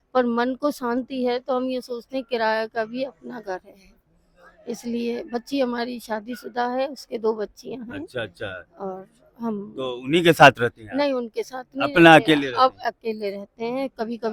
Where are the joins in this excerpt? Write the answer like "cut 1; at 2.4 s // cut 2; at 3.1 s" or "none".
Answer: none